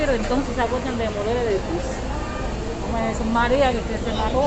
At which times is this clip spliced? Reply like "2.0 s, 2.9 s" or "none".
none